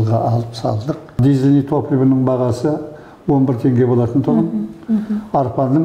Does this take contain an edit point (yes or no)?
yes